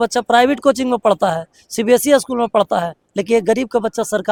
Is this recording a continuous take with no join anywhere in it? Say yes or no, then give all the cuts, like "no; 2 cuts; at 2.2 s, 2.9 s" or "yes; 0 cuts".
yes; 0 cuts